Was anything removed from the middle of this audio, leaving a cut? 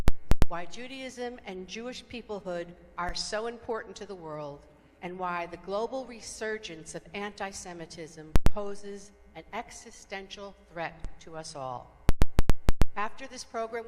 yes; 1 cut; at 6.4 s

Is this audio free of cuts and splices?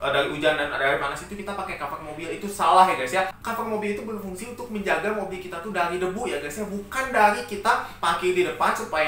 yes; 0 cuts

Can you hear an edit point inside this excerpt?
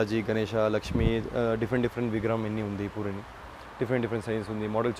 no; 0 cuts

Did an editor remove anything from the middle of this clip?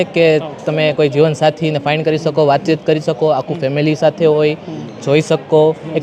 no; 0 cuts

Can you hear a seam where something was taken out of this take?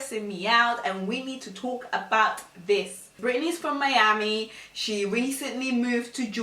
yes; 1 cut; at 3.1 s

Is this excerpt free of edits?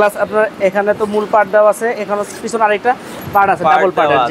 yes; 0 cuts

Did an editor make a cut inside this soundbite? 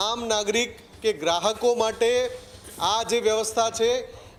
no; 0 cuts

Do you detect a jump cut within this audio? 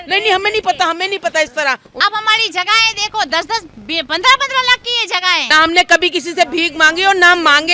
yes; 2 cuts; at 1.9 s, 5.4 s

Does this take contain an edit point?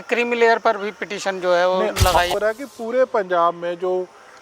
yes; 1 cut; at 2.3 s

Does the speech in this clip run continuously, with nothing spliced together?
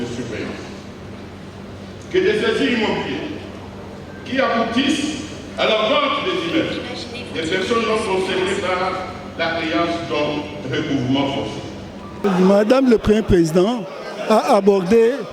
no; 1 cut; at 12.2 s

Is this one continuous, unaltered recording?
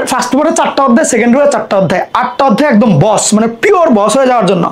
yes; 0 cuts

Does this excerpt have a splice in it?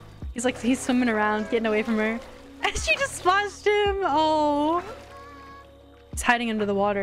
no; 0 cuts

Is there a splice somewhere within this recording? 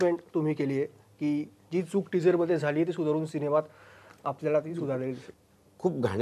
yes; 1 cut; at 5.2 s

